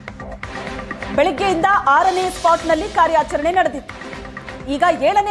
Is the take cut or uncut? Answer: cut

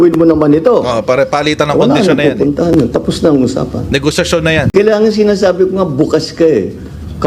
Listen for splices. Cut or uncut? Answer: cut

